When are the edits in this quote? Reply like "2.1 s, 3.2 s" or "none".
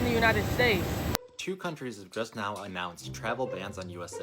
1.1 s